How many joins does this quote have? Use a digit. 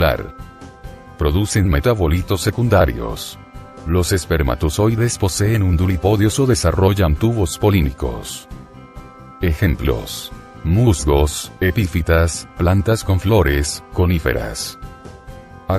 1